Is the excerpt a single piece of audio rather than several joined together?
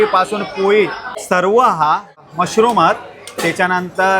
no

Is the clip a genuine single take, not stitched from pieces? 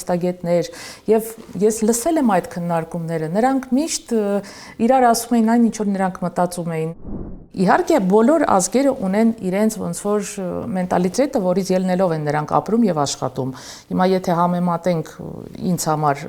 no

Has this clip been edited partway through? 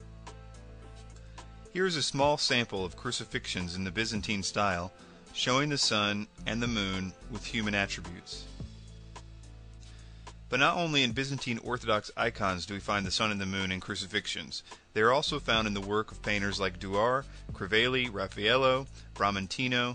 yes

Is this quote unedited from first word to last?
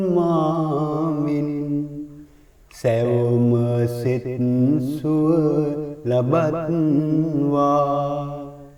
yes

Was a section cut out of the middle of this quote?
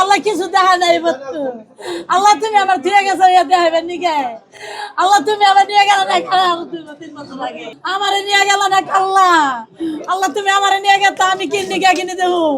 no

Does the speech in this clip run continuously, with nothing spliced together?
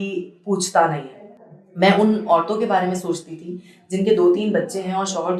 yes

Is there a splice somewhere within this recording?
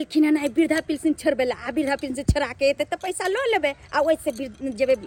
no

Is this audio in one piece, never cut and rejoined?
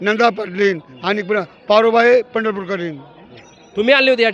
yes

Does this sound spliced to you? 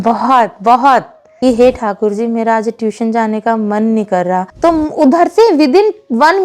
yes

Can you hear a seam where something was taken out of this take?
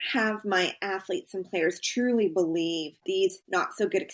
yes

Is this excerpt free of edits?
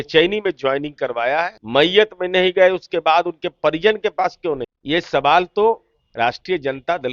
no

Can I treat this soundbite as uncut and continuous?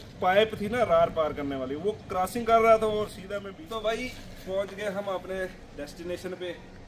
no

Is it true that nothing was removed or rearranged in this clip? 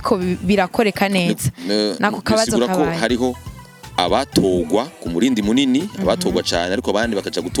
yes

